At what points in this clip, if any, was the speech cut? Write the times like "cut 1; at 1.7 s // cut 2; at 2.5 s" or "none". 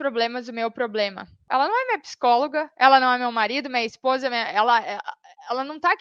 cut 1; at 1.4 s